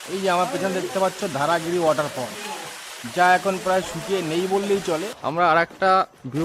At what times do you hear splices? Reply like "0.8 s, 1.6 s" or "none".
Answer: 5.1 s

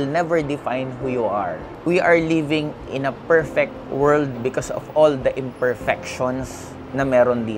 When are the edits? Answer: 1.7 s

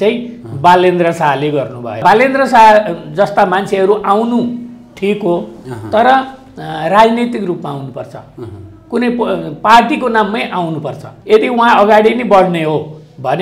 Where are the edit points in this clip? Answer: 2.0 s, 11.1 s

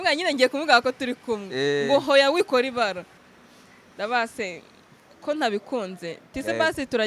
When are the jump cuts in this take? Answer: 3.1 s

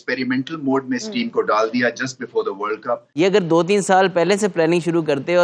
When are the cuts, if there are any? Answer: 3.1 s

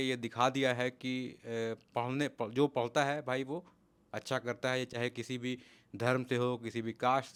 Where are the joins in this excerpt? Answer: none

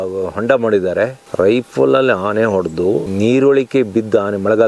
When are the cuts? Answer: 1.2 s

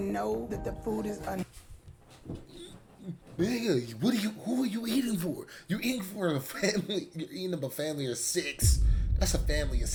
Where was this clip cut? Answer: none

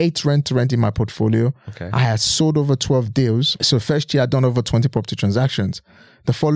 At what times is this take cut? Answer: none

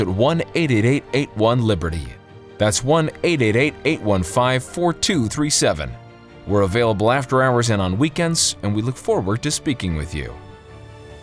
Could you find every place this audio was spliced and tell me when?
10.3 s

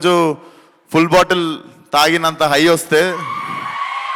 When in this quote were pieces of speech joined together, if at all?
none

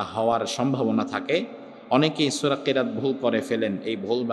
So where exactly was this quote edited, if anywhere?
none

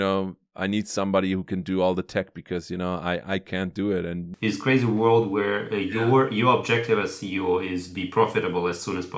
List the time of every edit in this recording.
4.3 s

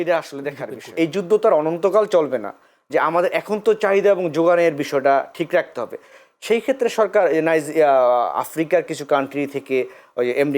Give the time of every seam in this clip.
0.9 s

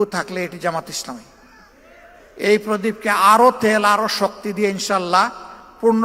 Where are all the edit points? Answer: 2.2 s

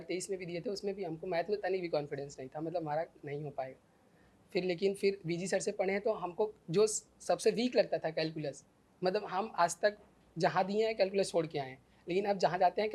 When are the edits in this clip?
none

